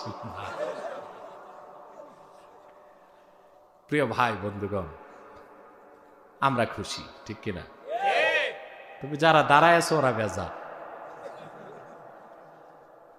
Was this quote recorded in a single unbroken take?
yes; 0 cuts

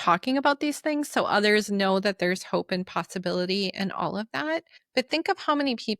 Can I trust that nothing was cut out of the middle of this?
no; 1 cut; at 4.8 s

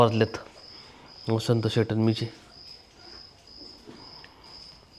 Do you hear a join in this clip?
no; 0 cuts

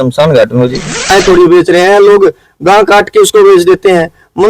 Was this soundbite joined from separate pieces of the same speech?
yes; 1 cut; at 1.1 s

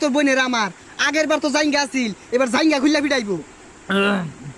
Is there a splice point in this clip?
no; 0 cuts

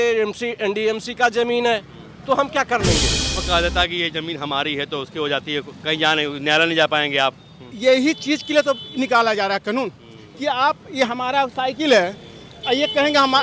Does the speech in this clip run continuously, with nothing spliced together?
no; 1 cut; at 3.3 s

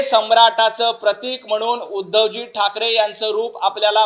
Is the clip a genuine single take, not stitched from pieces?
yes; 0 cuts

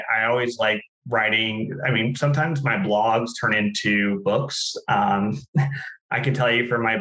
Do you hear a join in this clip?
yes; 1 cut; at 0.9 s

